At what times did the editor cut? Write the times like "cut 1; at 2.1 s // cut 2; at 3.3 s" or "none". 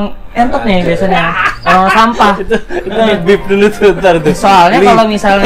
none